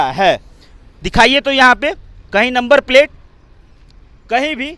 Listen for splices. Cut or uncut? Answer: uncut